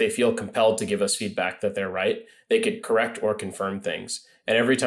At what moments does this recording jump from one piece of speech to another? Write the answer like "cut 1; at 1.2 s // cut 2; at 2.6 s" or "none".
cut 1; at 2.8 s